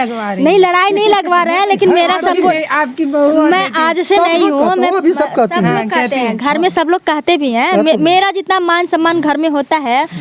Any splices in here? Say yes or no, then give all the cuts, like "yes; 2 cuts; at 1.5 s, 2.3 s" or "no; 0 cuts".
no; 0 cuts